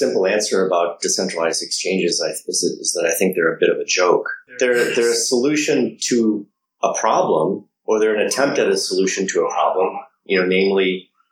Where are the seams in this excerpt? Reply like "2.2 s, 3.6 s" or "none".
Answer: 4.4 s

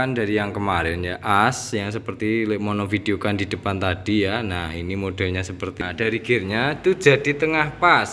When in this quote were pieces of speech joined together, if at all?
5.8 s

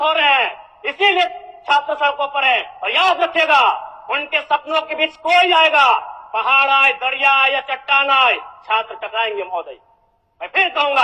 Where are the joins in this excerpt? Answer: none

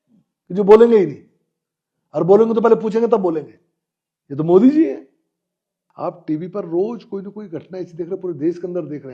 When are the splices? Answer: 5.8 s

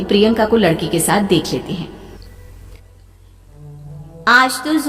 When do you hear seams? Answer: 2.2 s

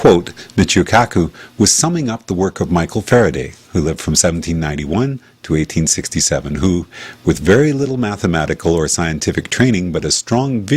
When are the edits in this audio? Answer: none

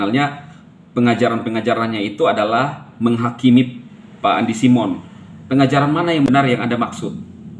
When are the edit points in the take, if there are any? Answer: 6.3 s

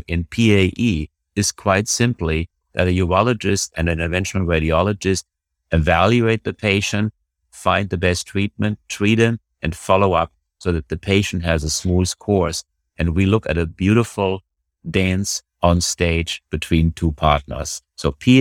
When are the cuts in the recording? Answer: 3.8 s

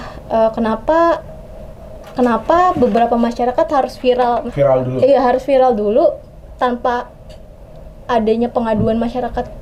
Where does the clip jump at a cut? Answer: none

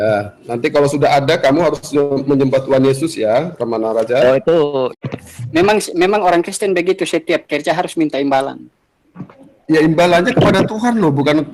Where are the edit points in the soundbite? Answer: 5.0 s

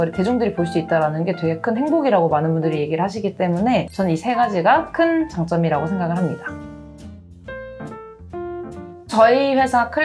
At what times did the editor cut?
none

